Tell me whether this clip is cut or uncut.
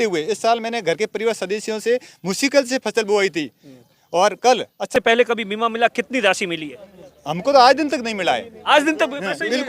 cut